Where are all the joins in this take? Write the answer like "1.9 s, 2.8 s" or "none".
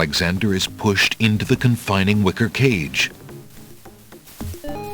3.1 s